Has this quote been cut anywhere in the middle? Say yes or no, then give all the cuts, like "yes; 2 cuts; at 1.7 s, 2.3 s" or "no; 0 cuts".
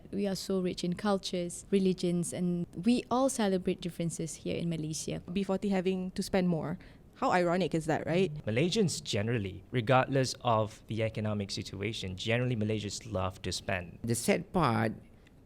yes; 5 cuts; at 1.6 s, 2.7 s, 5.3 s, 8.4 s, 14.0 s